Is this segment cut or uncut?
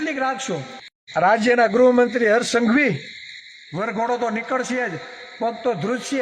cut